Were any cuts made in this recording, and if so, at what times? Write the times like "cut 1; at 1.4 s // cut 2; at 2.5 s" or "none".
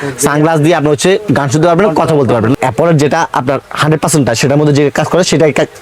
cut 1; at 2.6 s